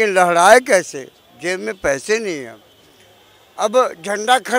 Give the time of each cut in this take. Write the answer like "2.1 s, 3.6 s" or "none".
none